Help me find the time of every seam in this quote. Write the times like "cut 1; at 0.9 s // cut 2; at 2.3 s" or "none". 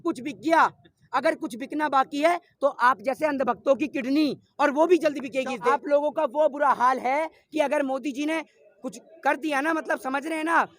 cut 1; at 5.7 s

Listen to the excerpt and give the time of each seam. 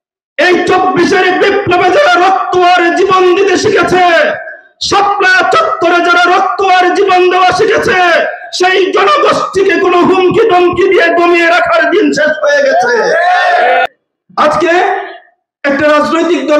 cut 1; at 13.9 s

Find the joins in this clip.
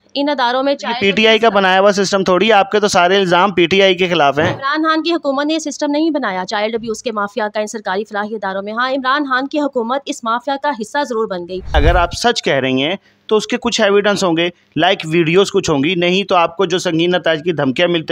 cut 1; at 11.7 s

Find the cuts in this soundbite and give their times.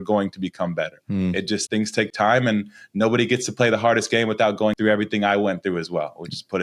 cut 1; at 1.6 s // cut 2; at 4.7 s

